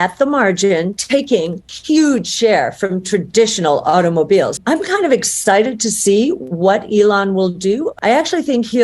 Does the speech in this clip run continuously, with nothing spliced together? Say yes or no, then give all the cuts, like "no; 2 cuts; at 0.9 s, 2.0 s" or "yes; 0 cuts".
no; 3 cuts; at 1.2 s, 4.5 s, 7.9 s